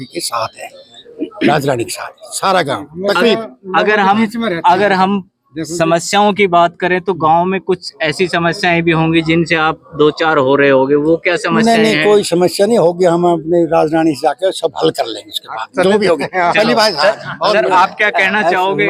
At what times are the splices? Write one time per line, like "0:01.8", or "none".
none